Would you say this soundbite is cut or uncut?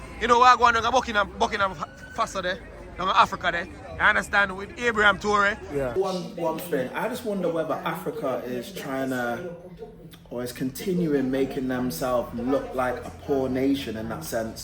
cut